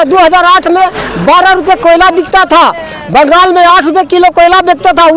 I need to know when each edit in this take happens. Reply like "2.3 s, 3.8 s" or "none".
none